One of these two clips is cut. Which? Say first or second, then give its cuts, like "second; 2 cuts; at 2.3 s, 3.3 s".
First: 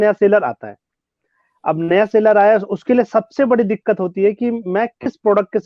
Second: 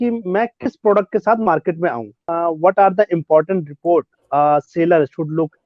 second; 1 cut; at 2.2 s